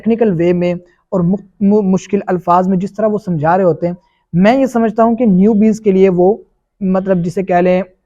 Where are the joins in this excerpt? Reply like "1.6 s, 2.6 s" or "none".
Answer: none